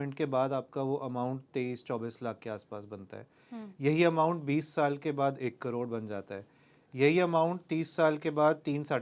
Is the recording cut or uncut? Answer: uncut